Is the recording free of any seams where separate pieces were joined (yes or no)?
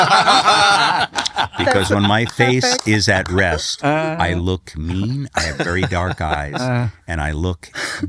yes